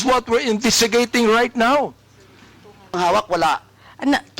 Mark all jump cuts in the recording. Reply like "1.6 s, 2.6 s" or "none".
3.0 s